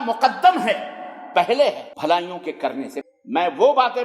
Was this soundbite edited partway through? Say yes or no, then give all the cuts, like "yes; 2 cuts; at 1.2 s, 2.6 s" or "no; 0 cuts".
yes; 2 cuts; at 1.9 s, 3.0 s